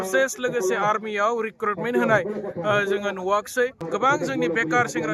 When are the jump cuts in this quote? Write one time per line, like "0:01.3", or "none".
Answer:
0:03.8